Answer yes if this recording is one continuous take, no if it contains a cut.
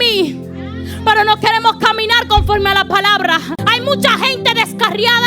no